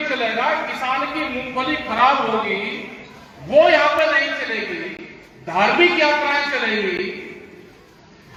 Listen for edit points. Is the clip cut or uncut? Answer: uncut